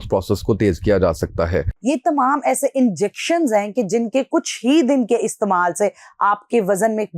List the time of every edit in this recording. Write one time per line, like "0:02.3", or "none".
0:01.7